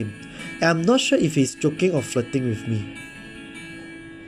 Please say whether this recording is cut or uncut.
uncut